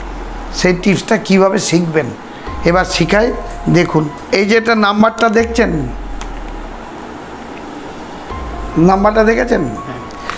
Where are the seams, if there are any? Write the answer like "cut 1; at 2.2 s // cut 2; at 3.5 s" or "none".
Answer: cut 1; at 4.2 s